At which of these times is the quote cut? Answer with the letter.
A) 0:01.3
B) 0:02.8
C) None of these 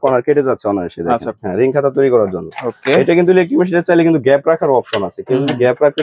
A